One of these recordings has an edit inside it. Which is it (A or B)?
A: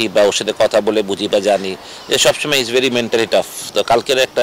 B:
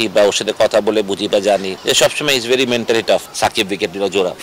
B